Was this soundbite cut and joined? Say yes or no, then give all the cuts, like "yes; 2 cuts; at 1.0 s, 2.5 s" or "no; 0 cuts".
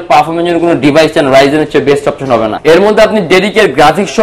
yes; 1 cut; at 2.6 s